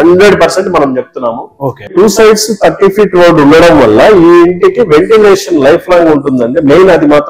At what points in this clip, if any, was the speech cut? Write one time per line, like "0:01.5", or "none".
0:01.9